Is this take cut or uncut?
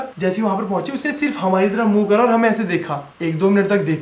uncut